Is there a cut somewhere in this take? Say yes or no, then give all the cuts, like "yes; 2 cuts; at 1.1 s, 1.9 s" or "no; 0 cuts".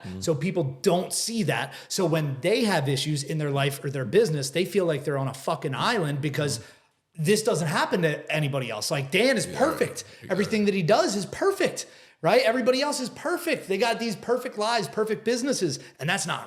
no; 0 cuts